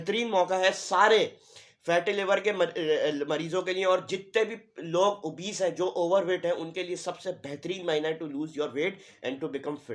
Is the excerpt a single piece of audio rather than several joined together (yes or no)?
yes